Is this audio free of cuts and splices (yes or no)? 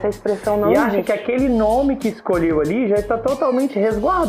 no